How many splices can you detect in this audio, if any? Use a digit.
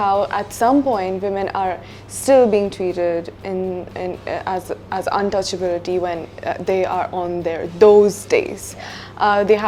0